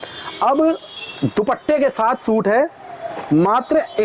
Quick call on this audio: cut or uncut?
uncut